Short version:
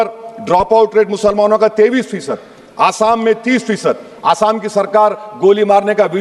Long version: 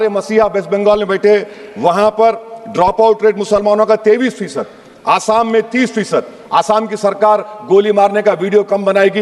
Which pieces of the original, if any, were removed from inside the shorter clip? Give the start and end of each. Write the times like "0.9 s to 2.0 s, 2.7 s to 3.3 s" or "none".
none